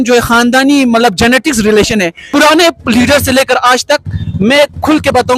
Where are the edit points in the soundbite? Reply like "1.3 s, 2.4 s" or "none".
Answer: 2.2 s